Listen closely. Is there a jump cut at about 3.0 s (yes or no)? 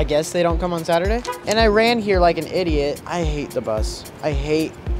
yes